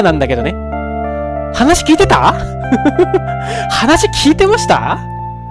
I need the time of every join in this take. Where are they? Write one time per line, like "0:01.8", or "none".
none